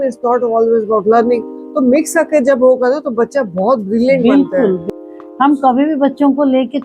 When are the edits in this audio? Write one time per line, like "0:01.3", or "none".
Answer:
0:04.8